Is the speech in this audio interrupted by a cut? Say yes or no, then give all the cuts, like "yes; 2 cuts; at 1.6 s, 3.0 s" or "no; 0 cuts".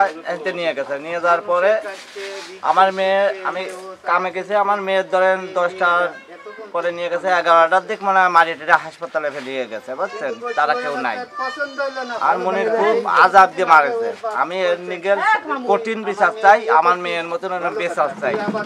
no; 0 cuts